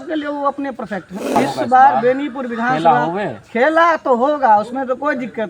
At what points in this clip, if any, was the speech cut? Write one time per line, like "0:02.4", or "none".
0:01.4